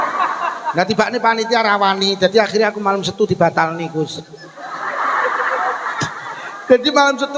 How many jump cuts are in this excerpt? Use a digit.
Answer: 0